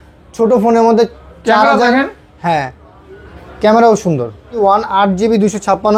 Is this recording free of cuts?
no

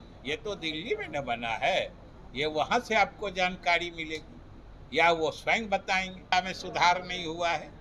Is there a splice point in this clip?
yes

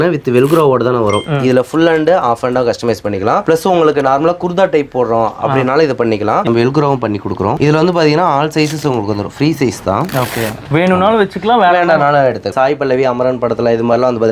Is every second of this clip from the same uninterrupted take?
no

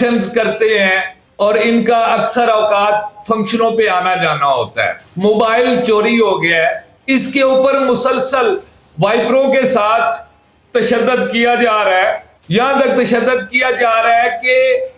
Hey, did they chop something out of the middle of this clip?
yes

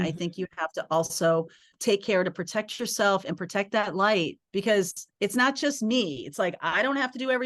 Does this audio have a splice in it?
yes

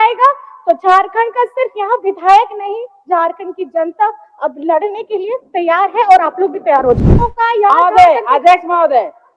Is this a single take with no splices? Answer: no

